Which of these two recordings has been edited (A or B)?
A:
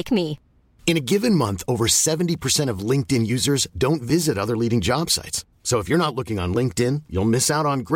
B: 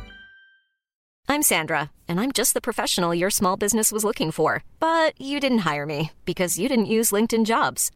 B